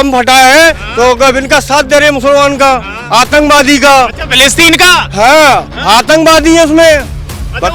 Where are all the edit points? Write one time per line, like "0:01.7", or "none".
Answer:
none